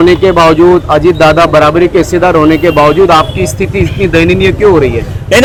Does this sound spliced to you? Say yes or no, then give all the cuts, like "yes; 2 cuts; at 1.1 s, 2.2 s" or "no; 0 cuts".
no; 0 cuts